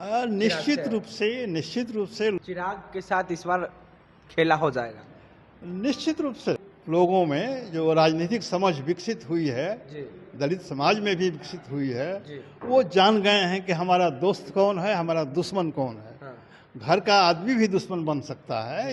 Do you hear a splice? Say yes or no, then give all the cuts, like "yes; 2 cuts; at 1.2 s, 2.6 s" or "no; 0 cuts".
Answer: yes; 2 cuts; at 2.4 s, 6.7 s